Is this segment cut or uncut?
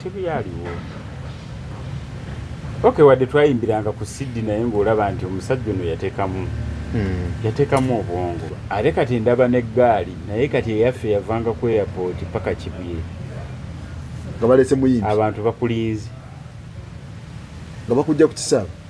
cut